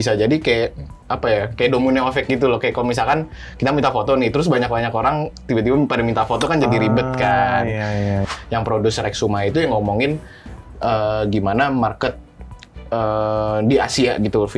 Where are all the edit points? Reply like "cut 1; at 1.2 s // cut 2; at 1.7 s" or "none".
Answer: cut 1; at 8.2 s